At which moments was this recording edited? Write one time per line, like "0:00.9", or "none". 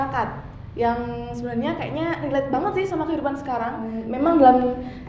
0:04.0